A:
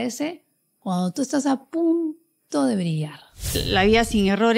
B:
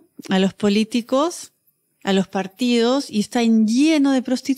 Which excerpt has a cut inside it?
A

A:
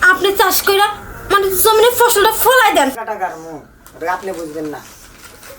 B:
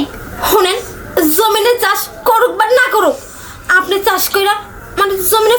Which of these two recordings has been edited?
A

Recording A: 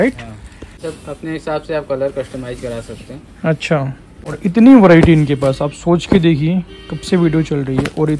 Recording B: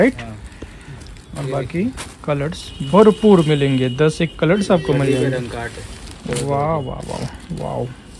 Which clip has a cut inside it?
A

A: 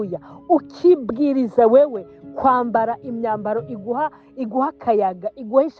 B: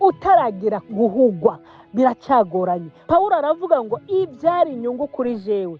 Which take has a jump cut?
B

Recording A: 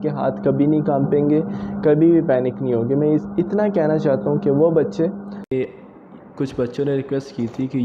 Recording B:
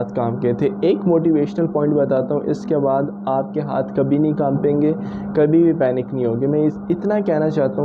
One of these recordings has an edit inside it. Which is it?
A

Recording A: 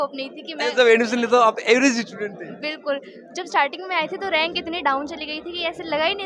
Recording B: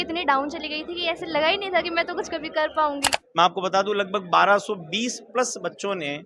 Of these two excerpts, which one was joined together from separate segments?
B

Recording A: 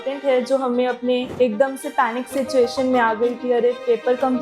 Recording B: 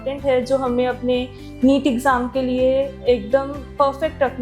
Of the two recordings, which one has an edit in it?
A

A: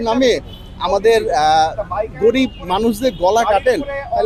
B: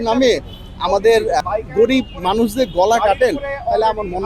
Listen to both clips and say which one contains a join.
B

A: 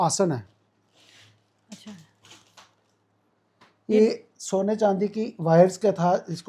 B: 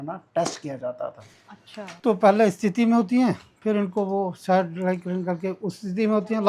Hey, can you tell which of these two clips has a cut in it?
B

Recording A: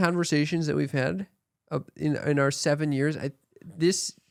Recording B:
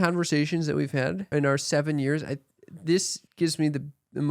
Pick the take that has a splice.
B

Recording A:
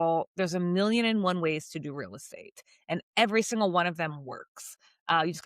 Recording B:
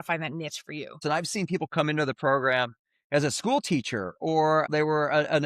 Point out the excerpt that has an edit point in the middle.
B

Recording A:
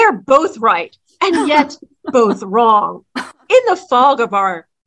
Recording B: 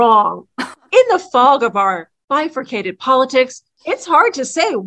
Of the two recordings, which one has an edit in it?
B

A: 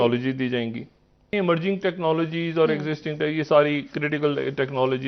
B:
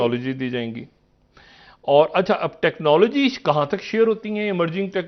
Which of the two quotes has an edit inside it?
A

